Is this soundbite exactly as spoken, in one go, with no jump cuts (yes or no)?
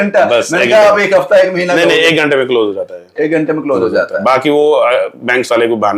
yes